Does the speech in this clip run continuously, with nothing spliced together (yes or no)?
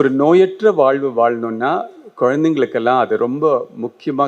yes